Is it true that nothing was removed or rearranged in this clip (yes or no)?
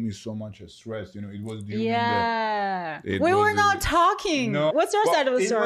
no